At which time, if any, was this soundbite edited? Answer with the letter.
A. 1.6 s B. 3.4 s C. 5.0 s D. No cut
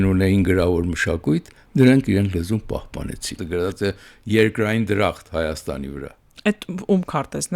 B